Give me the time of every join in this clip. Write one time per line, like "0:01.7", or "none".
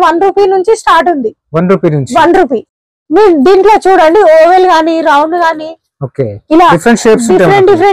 none